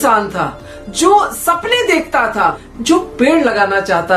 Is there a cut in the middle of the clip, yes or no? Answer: yes